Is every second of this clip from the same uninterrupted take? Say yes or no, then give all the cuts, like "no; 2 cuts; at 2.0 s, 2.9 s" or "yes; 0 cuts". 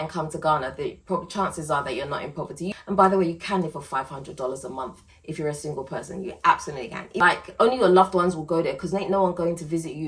no; 2 cuts; at 2.7 s, 7.2 s